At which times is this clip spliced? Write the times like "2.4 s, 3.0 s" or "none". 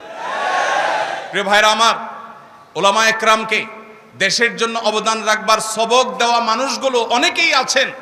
none